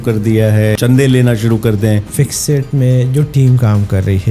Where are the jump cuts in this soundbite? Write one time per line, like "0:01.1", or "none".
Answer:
0:00.8
0:02.1